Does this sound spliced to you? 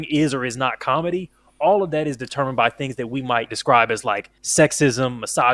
yes; 2 cuts; at 3.5 s, 4.3 s

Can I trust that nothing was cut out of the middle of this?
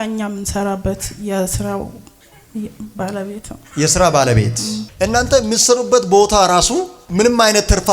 no; 1 cut; at 4.9 s

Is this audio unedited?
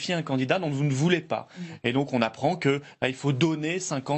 yes; 0 cuts

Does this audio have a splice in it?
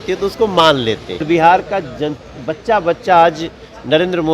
yes; 1 cut; at 1.2 s

